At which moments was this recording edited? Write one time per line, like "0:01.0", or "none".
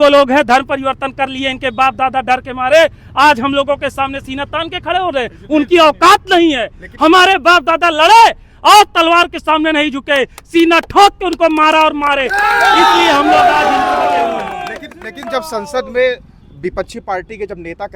none

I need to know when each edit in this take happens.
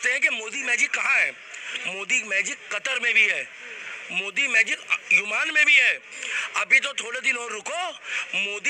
none

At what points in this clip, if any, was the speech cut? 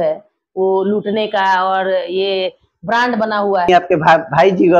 0:03.7

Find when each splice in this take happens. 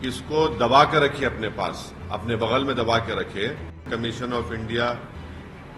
0:03.9

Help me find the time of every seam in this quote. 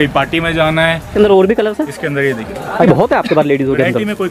0:01.1
0:02.9

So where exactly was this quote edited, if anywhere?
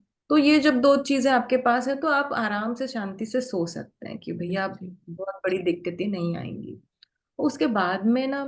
none

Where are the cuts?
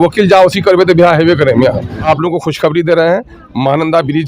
0:02.0

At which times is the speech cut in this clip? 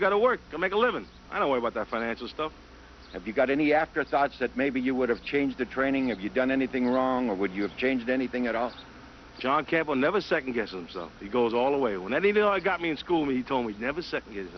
0:11.0

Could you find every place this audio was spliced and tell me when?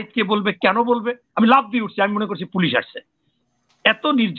0:01.3

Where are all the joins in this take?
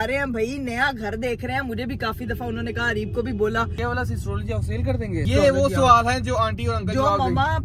0:03.8
0:05.3

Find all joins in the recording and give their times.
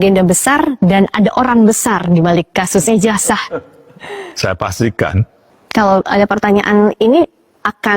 0:05.4

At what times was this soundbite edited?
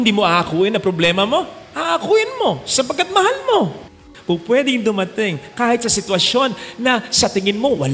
0:03.8

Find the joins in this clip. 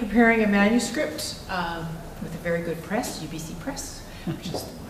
none

